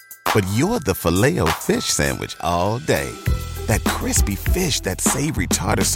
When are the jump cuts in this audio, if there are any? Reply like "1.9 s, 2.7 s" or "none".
none